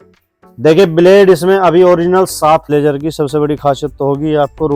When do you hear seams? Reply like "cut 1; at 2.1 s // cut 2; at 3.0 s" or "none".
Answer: cut 1; at 2.6 s